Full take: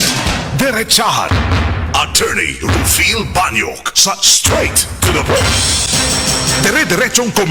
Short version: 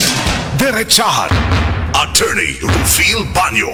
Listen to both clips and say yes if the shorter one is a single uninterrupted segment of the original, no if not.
yes